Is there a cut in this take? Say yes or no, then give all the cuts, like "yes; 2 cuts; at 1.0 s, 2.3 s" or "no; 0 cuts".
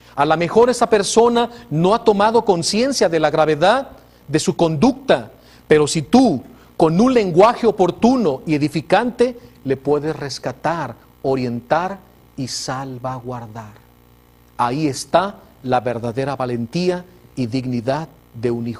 no; 0 cuts